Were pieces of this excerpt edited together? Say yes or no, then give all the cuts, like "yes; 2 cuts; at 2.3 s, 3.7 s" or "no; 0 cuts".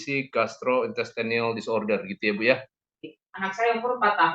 yes; 1 cut; at 3.1 s